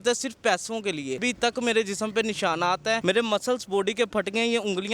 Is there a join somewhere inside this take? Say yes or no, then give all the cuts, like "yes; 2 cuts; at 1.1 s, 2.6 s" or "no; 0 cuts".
yes; 2 cuts; at 1.2 s, 3.0 s